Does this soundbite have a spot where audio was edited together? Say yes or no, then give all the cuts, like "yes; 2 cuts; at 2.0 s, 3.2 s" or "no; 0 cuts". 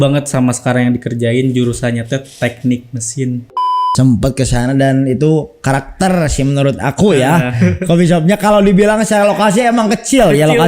yes; 1 cut; at 3.5 s